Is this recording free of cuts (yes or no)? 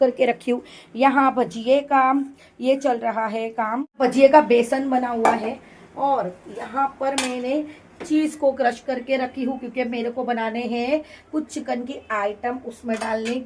yes